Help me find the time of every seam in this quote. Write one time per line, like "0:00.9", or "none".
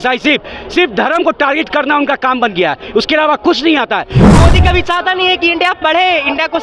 0:04.3